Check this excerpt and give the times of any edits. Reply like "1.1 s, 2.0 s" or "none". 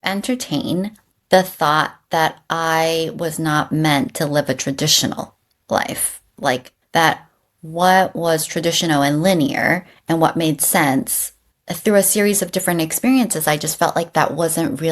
none